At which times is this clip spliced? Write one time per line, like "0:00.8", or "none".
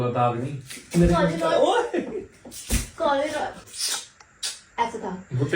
0:03.6